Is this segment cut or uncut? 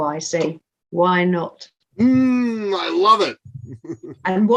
uncut